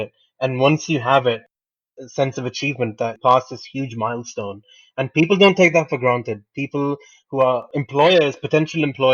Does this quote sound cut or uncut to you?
cut